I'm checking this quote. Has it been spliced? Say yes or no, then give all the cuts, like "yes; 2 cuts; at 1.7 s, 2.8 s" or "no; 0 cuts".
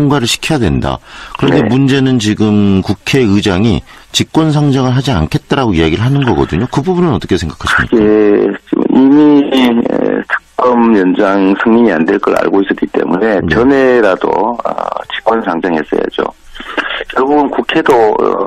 no; 0 cuts